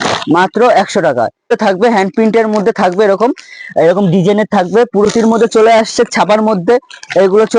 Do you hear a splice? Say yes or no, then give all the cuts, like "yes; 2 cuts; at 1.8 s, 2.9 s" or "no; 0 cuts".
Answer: yes; 2 cuts; at 1.5 s, 5.0 s